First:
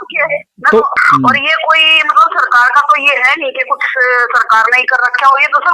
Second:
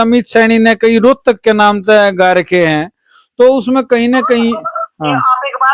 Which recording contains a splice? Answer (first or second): first